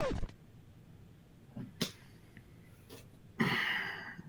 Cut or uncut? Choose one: uncut